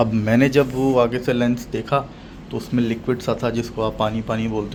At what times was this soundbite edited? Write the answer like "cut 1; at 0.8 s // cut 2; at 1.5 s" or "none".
none